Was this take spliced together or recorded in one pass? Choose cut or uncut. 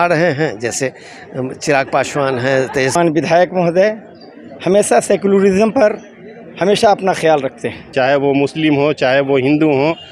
cut